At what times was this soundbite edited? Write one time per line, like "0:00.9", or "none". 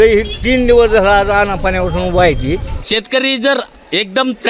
0:02.8